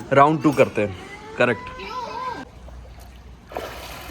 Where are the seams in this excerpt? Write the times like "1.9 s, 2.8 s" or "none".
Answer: 2.5 s